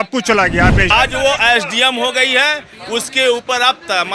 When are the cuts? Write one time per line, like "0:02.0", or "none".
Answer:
0:00.9